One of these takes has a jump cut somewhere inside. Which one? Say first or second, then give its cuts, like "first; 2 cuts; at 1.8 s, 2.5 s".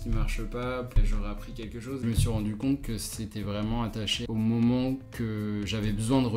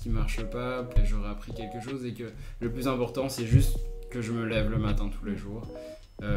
first; 3 cuts; at 2.0 s, 4.2 s, 5.1 s